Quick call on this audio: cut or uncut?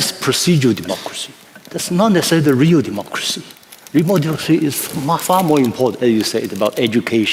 uncut